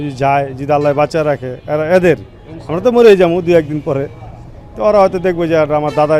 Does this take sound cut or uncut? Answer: uncut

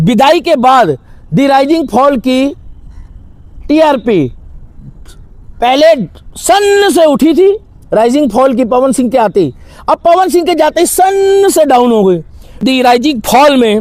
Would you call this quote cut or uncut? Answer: cut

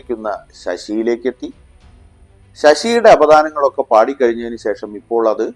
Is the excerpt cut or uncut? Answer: uncut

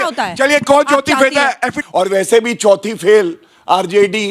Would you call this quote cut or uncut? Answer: cut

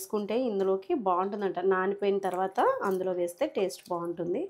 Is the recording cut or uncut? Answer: uncut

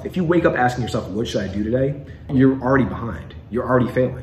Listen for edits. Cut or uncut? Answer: cut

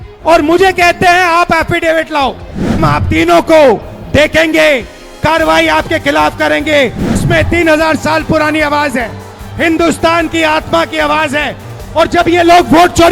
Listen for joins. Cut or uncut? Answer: cut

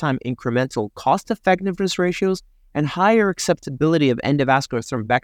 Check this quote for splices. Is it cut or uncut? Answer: uncut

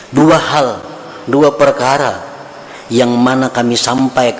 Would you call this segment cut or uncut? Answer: uncut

